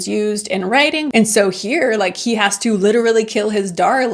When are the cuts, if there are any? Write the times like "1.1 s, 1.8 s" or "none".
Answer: 1.1 s

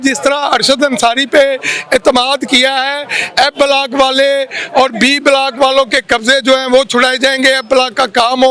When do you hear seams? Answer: none

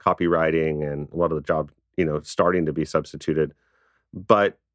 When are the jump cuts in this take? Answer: 1.1 s

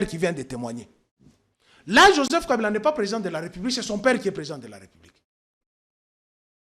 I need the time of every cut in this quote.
none

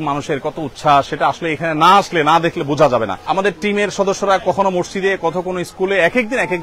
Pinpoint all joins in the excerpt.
1.1 s, 3.2 s

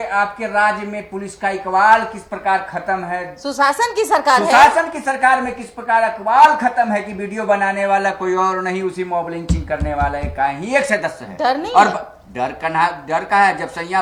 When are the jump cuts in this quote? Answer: none

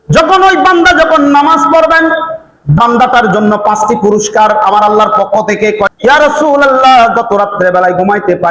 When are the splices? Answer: 2.8 s, 5.9 s

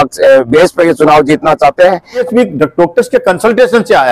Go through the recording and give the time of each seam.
2.2 s

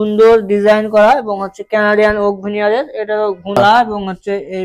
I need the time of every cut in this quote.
3.6 s

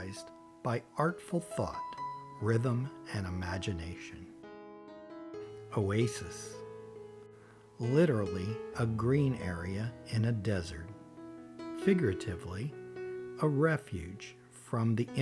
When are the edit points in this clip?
3.9 s, 5.6 s

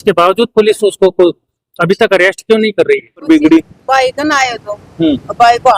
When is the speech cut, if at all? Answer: 3.2 s

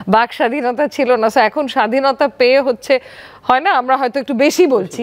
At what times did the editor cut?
none

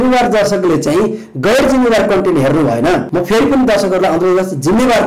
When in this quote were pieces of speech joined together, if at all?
3.1 s

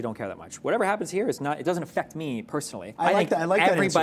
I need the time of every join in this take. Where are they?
2.9 s

